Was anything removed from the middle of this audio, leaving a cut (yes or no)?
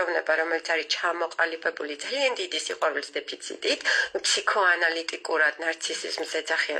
no